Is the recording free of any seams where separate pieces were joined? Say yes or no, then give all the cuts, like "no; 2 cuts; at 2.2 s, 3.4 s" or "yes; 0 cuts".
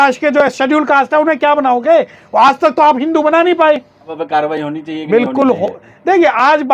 no; 1 cut; at 4.2 s